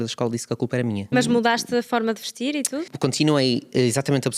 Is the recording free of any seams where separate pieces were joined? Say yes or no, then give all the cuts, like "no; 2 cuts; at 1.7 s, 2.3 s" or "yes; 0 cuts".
no; 2 cuts; at 1.1 s, 2.9 s